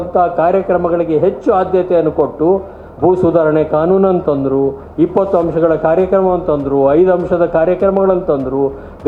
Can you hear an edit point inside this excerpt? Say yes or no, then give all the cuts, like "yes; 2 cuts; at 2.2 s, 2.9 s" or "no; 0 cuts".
no; 0 cuts